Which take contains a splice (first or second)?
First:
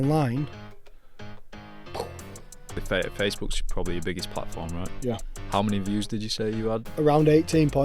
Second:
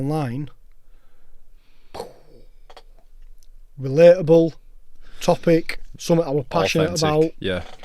first